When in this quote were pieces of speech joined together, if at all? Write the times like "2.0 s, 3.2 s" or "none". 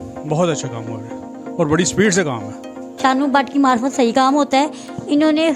2.8 s